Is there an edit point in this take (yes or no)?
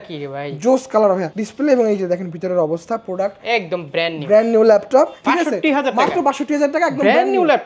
yes